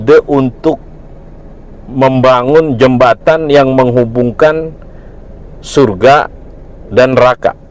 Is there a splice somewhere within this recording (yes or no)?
no